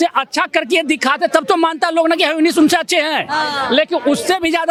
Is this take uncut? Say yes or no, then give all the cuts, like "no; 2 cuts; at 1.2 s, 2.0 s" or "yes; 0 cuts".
yes; 0 cuts